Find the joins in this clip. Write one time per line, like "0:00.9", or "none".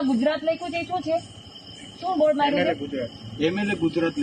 none

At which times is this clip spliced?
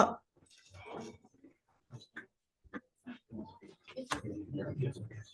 none

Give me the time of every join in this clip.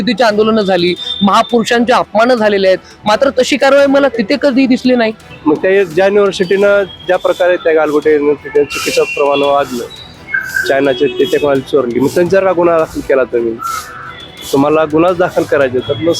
0:05.2

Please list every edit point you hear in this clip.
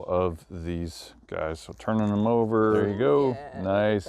0:02.9

